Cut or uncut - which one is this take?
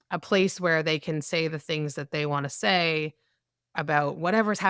uncut